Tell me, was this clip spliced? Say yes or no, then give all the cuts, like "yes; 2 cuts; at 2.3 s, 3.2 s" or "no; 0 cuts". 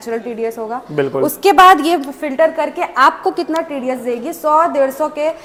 no; 0 cuts